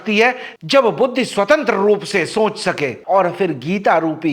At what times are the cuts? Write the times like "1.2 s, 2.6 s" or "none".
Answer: 3.0 s